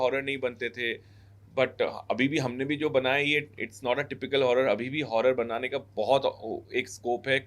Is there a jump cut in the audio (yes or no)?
no